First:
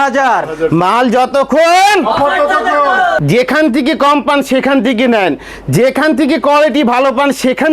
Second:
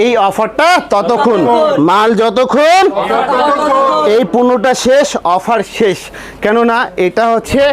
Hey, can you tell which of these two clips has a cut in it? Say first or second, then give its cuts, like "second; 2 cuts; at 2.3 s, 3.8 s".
first; 1 cut; at 3.2 s